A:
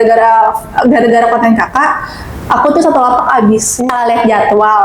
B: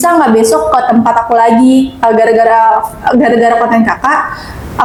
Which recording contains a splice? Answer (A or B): A